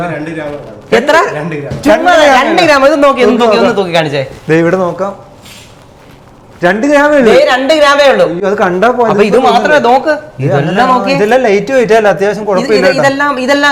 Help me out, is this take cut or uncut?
uncut